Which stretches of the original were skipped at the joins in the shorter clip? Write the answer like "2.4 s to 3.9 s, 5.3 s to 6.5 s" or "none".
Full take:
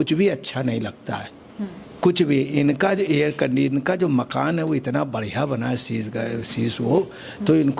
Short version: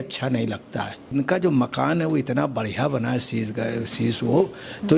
1.5 s to 3.7 s